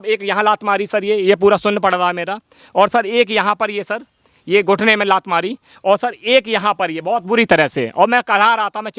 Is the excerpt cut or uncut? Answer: uncut